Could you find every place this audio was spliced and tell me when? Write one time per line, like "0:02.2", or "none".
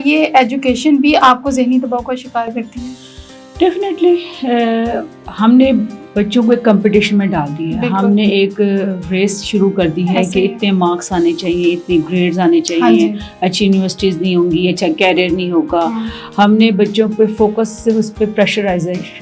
none